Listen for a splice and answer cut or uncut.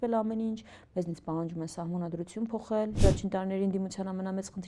cut